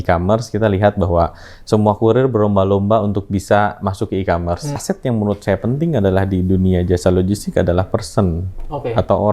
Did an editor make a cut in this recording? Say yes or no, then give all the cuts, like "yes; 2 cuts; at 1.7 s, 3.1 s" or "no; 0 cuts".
yes; 1 cut; at 4.8 s